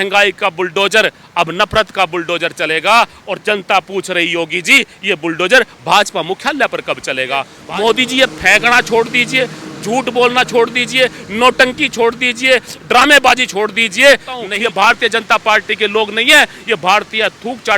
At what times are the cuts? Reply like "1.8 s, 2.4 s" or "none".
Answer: 7.6 s, 14.5 s